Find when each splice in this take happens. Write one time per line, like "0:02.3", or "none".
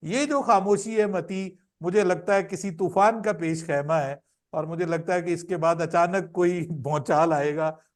none